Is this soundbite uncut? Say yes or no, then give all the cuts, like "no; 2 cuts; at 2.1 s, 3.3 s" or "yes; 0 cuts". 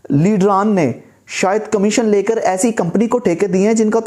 yes; 0 cuts